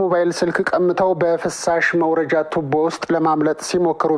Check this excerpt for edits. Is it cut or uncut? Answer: uncut